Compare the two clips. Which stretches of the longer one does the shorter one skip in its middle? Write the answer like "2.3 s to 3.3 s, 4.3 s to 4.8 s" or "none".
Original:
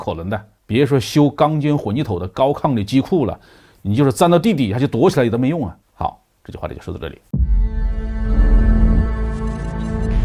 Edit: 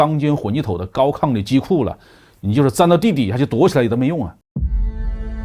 5.8 s to 7.2 s